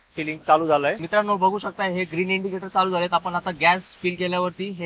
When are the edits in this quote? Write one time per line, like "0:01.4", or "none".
0:01.0